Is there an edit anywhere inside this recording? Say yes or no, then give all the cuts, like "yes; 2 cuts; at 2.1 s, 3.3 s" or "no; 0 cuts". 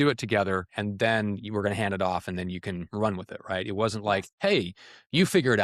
no; 0 cuts